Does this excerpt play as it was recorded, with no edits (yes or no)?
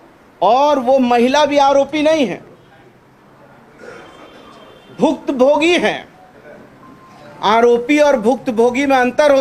yes